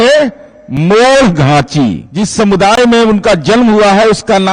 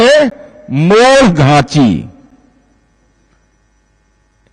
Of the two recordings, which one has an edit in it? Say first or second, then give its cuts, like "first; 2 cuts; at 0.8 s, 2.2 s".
first; 1 cut; at 2.0 s